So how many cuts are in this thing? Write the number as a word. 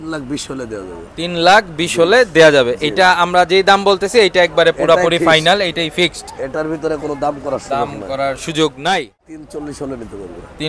one